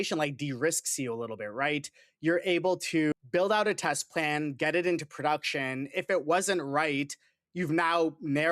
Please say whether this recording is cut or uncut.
cut